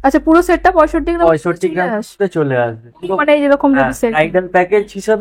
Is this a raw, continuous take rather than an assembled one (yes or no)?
yes